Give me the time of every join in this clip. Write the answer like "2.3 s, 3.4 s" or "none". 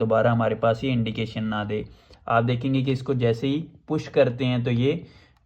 none

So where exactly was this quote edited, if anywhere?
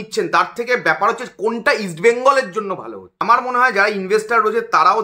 3.1 s

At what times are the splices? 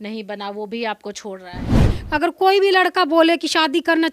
1.8 s

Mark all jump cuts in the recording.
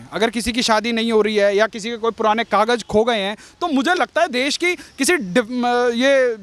none

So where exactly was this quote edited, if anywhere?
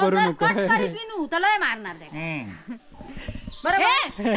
none

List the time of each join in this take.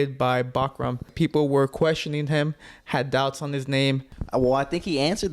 1.1 s, 4.1 s

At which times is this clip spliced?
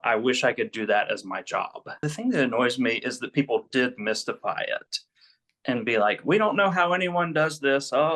1.8 s

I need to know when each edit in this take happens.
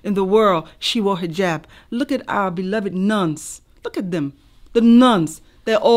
none

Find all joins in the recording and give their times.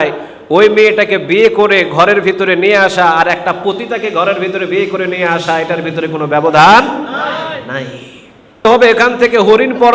8.7 s

